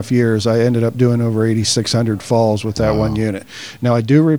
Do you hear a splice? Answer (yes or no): no